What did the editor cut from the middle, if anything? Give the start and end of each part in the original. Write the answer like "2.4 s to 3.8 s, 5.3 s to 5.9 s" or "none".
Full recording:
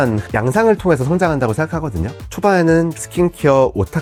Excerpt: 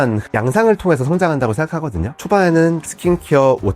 2.1 s to 2.2 s